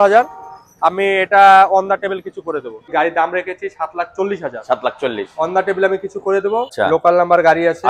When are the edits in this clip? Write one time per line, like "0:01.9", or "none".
0:02.9
0:06.7